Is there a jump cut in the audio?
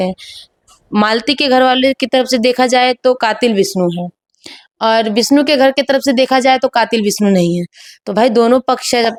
no; 0 cuts

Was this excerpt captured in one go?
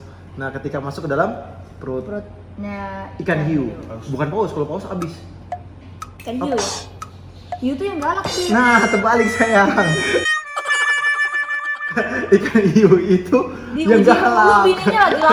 yes; 0 cuts

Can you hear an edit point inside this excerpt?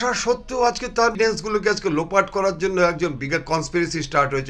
yes; 1 cut; at 1.1 s

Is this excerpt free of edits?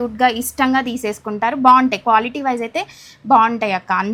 yes; 0 cuts

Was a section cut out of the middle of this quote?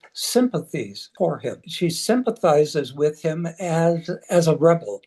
yes; 3 cuts; at 1.0 s, 1.7 s, 4.1 s

